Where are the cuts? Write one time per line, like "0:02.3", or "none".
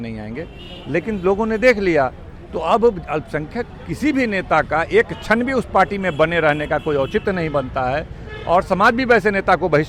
none